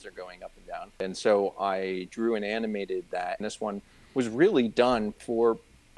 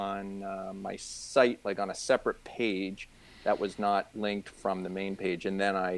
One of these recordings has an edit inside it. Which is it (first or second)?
first